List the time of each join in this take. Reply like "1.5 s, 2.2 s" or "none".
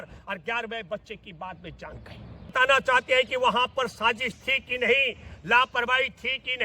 2.5 s